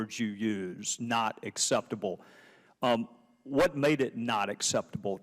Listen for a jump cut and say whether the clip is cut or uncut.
cut